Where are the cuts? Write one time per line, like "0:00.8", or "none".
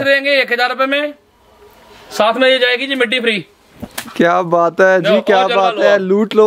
none